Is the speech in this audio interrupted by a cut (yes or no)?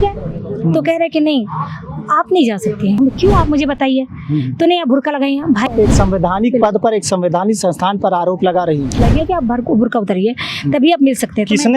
yes